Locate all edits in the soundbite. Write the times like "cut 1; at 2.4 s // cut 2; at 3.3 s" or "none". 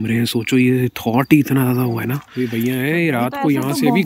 cut 1; at 2.2 s